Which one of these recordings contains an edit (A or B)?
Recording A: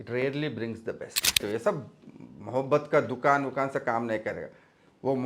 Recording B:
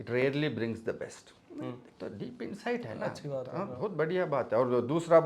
A